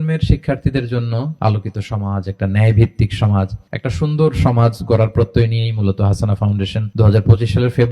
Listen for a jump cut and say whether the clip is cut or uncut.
cut